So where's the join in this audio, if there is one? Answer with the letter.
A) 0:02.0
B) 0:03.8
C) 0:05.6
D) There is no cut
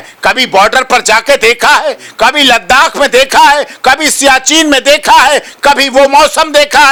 D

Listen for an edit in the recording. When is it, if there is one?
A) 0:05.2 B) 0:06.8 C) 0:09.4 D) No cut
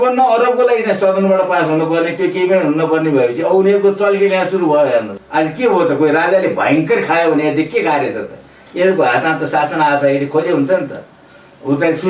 A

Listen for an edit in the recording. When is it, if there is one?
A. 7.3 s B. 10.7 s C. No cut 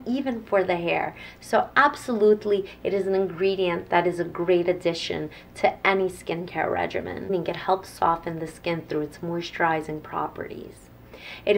A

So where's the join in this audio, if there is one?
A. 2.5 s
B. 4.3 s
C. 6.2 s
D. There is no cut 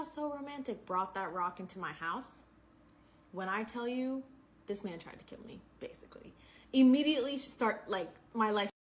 D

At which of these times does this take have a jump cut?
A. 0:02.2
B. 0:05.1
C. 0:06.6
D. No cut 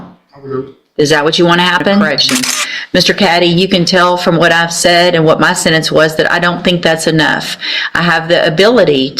A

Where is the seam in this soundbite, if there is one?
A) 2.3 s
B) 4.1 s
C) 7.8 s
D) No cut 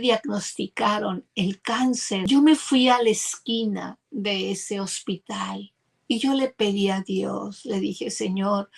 A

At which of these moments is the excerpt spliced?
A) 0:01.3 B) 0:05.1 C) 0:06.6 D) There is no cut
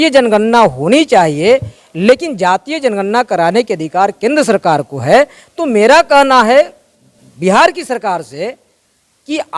D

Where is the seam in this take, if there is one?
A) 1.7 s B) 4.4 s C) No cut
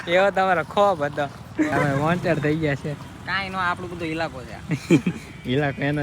A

